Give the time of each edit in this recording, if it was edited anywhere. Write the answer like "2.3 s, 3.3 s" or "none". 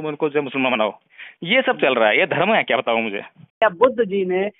3.6 s